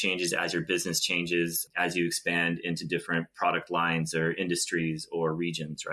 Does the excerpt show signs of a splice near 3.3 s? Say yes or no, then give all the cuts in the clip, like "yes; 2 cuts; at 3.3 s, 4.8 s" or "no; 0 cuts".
no; 0 cuts